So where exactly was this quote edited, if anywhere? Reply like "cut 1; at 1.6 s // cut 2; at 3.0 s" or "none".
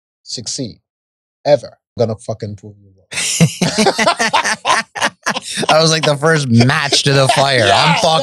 cut 1; at 2.0 s